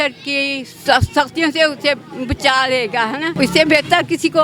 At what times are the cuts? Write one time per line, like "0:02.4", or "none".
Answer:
0:00.8
0:03.4